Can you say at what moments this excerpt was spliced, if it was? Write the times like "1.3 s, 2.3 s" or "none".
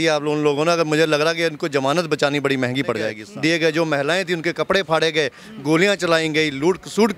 3.2 s